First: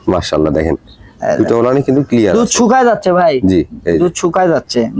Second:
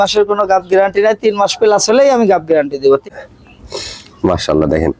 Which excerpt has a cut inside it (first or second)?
second